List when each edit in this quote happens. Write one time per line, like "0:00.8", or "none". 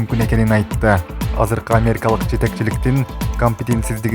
0:01.2